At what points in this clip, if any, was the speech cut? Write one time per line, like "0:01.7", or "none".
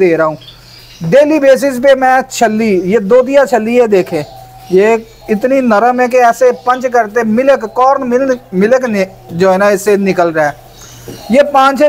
none